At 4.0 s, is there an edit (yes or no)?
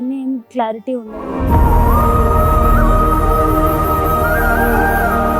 no